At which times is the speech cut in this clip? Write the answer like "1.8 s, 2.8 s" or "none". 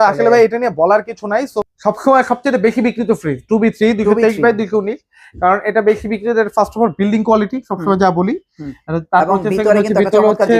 1.5 s